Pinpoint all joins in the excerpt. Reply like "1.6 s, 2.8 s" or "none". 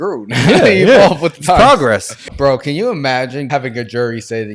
2.1 s, 3.5 s